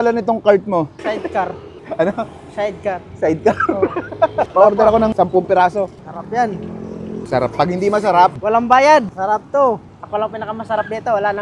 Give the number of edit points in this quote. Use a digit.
0